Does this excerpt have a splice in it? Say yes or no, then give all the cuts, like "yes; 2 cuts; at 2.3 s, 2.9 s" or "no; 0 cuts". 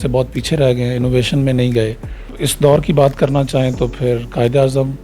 yes; 1 cut; at 2.2 s